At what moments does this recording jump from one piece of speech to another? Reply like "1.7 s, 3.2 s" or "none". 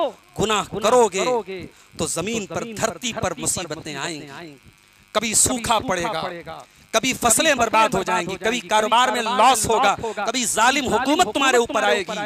none